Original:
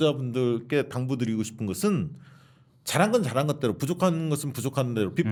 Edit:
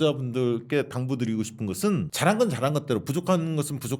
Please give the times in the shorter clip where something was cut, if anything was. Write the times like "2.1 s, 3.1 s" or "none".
2.1 s